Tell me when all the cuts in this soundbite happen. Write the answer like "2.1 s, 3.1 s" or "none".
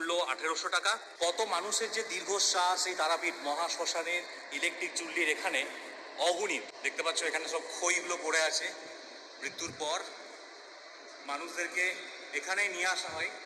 1.1 s, 6.8 s